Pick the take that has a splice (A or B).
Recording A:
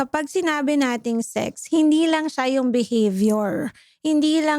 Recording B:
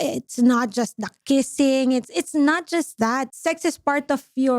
B